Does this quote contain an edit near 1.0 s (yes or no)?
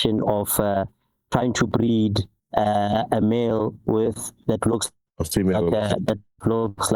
no